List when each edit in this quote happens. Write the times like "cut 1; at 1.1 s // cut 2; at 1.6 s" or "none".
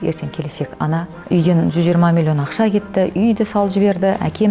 cut 1; at 1.1 s